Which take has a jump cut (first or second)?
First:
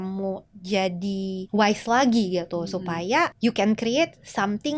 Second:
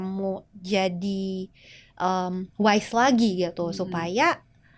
first